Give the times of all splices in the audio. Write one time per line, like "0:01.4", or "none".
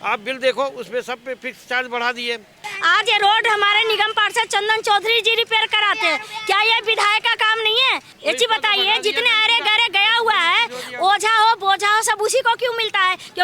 0:02.7
0:08.1